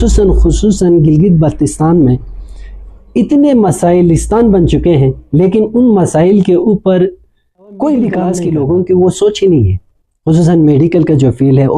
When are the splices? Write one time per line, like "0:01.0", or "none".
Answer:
0:08.4